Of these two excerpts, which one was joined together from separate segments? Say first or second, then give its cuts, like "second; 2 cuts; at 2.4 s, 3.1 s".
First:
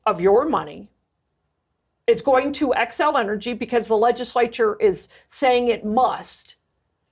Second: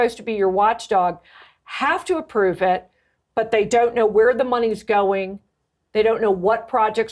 first; 1 cut; at 1.7 s